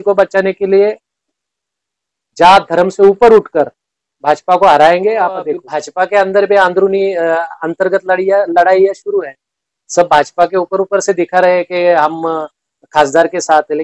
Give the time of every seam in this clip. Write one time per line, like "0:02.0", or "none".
0:05.8